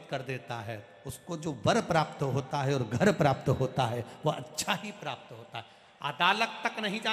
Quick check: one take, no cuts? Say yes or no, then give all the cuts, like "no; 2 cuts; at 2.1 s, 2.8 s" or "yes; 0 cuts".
yes; 0 cuts